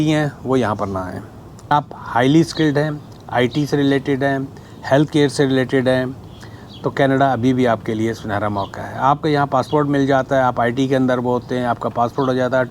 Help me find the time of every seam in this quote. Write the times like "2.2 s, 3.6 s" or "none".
1.7 s